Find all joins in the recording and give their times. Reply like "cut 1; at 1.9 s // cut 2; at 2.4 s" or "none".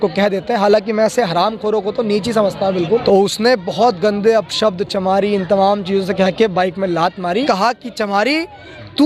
cut 1; at 3.0 s // cut 2; at 7.4 s